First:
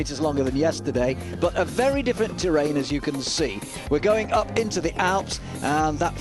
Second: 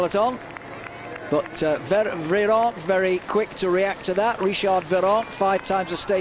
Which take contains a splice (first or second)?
second